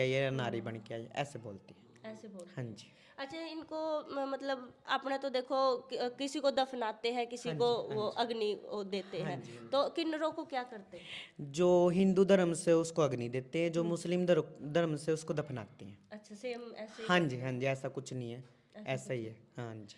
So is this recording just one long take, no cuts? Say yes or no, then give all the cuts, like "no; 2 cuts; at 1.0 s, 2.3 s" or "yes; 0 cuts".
yes; 0 cuts